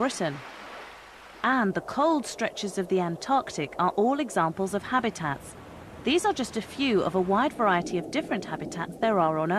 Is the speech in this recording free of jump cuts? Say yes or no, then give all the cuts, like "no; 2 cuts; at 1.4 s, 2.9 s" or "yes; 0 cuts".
no; 1 cut; at 7.1 s